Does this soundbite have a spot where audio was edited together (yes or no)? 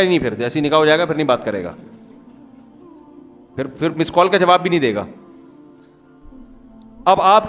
yes